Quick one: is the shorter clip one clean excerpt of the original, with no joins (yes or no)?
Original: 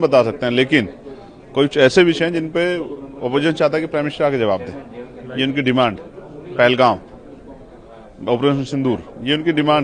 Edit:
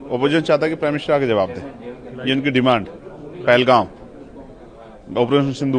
yes